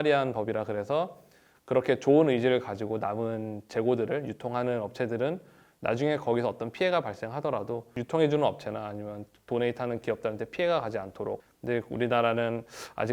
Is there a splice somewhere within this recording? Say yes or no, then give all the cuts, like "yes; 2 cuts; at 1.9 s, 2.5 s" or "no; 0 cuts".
yes; 1 cut; at 11.5 s